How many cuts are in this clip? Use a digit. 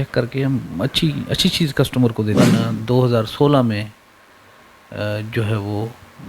1